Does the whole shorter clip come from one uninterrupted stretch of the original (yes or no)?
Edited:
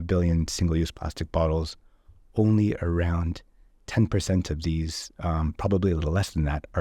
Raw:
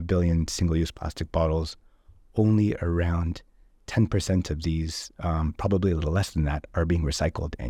yes